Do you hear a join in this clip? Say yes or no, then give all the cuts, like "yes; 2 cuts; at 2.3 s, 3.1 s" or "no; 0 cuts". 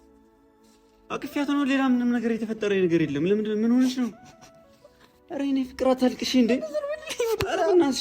yes; 1 cut; at 1.1 s